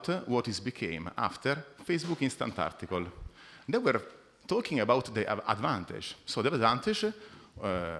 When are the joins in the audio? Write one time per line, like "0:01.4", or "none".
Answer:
0:02.7